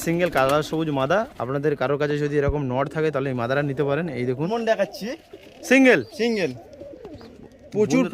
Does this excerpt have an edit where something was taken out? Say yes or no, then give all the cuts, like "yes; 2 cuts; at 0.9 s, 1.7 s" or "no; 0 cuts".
yes; 1 cut; at 4.5 s